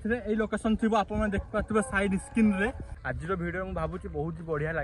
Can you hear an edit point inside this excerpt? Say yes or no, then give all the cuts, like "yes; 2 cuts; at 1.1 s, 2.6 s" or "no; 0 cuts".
yes; 1 cut; at 2.9 s